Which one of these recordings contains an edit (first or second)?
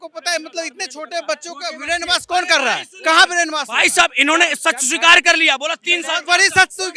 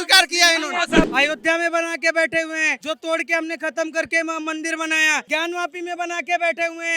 second